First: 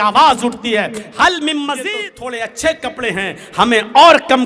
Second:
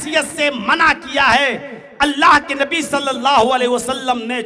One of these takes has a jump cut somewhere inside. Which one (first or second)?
first